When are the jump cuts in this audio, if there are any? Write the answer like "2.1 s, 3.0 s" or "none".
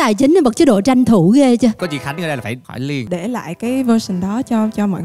1.8 s, 3.1 s

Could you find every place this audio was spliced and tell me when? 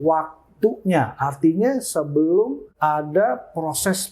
2.6 s

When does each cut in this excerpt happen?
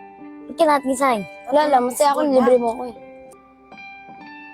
3.3 s

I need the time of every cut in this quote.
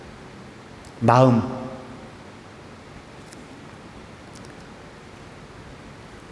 3.1 s

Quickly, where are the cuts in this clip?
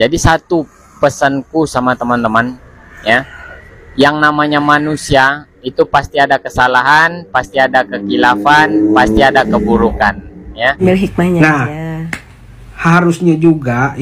10.8 s

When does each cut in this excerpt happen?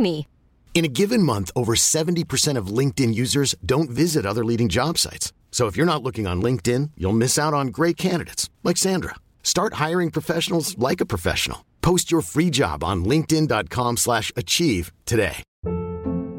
15.5 s

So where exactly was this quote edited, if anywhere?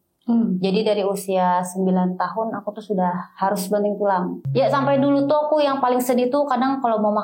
4.4 s

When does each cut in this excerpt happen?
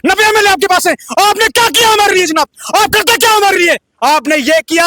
none

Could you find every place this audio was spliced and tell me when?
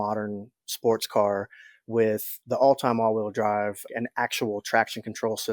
2.3 s, 3.8 s

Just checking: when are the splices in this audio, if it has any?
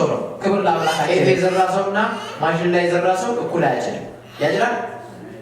1.1 s

